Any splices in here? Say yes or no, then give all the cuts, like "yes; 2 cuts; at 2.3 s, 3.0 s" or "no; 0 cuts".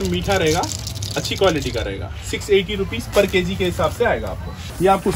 no; 0 cuts